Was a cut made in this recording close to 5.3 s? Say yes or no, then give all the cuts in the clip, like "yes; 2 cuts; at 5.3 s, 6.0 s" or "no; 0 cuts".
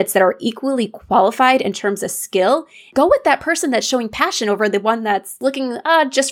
yes; 2 cuts; at 2.9 s, 5.3 s